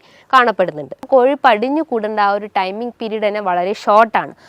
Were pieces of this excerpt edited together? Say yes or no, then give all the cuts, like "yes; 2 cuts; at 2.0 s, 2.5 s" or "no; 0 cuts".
yes; 1 cut; at 1.1 s